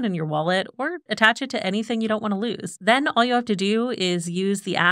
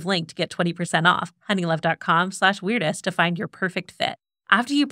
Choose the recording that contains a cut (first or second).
first